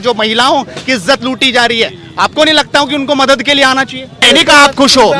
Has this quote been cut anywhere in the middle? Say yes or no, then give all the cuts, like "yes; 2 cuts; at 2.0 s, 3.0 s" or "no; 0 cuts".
yes; 1 cut; at 4.2 s